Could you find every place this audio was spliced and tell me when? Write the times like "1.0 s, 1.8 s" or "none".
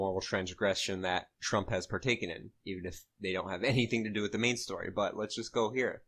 3.4 s